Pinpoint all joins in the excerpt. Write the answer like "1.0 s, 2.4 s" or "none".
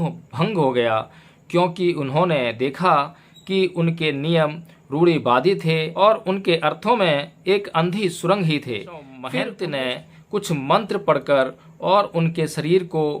5.9 s, 9.1 s